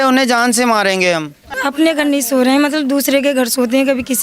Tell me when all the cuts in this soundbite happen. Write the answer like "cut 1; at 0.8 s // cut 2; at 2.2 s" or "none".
cut 1; at 1.6 s